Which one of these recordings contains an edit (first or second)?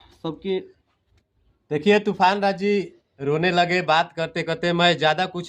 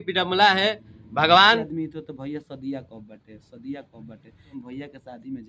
second